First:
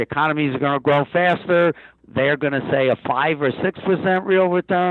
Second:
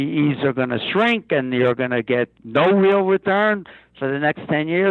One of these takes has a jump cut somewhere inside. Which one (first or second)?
first